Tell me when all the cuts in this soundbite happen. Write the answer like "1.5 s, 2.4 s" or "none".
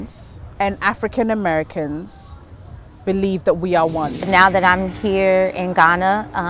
4.3 s